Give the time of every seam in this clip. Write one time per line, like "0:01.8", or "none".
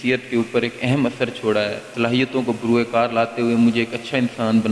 0:01.8

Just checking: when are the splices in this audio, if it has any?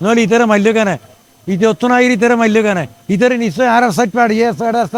none

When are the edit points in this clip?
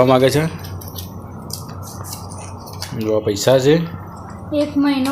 none

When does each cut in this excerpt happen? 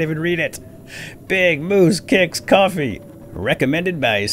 0:03.1

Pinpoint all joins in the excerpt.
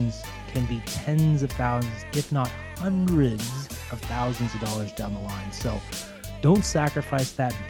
none

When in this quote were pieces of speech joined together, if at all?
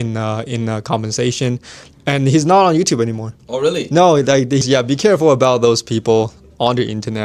0:04.6

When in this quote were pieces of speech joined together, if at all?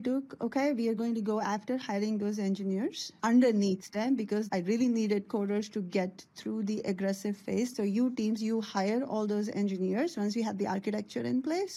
0:03.1
0:04.5
0:07.7

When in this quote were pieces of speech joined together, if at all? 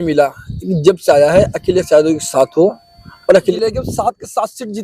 0:03.5

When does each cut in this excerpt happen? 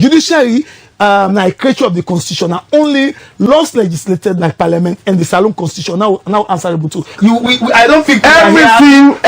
0:07.1

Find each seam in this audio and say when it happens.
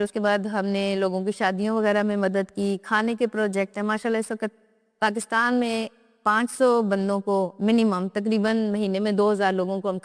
none

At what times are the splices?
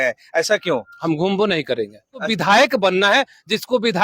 0:02.3

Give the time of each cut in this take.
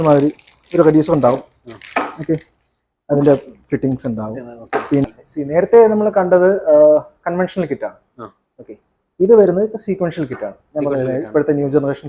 0:05.0

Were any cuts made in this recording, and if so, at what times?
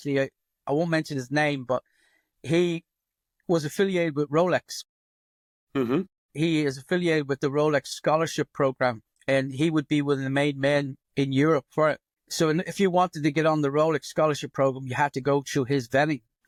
none

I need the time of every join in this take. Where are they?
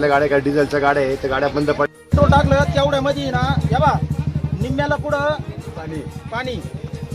0:01.9

